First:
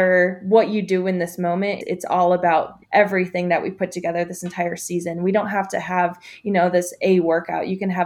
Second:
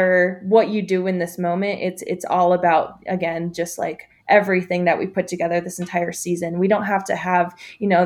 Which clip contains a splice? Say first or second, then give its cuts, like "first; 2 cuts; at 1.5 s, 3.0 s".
first; 2 cuts; at 1.8 s, 2.8 s